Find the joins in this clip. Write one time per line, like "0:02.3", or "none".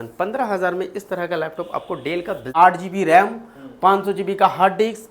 0:02.4